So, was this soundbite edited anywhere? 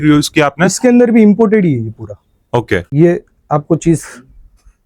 yes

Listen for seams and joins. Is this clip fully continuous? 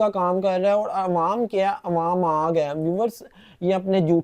yes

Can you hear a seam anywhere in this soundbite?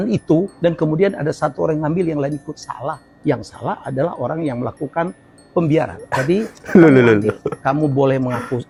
no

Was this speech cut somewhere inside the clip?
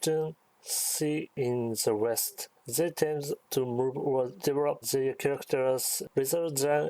yes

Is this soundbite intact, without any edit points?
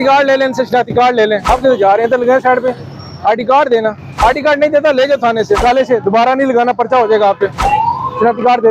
no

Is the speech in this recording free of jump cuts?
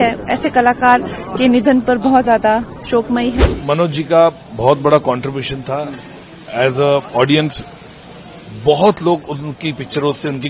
no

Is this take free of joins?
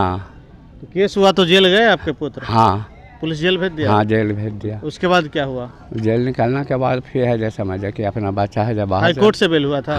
yes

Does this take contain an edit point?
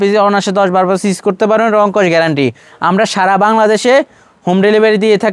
no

